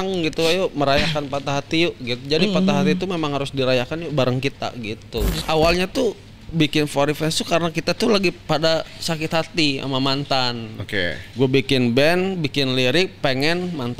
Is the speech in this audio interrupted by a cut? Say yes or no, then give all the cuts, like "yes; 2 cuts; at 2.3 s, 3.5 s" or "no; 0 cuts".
yes; 2 cuts; at 5.4 s, 11.2 s